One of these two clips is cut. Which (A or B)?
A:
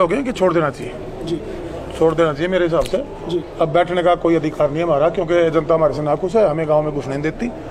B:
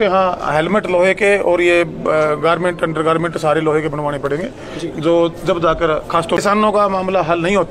B